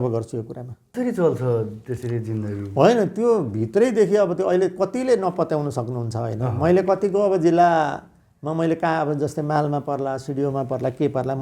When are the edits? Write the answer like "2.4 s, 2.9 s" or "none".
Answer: 0.9 s